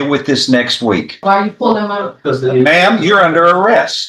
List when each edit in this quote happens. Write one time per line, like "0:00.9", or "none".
0:01.2